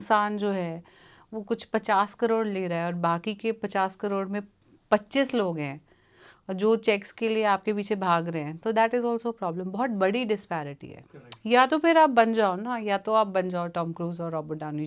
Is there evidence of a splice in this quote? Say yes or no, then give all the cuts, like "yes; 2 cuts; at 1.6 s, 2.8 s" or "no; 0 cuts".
no; 0 cuts